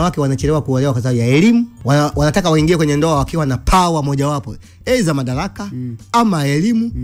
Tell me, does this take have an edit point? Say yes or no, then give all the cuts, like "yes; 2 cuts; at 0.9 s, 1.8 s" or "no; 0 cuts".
yes; 1 cut; at 1.8 s